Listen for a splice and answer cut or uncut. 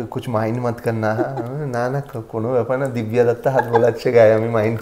uncut